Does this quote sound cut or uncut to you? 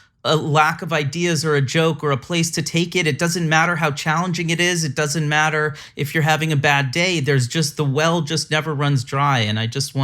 uncut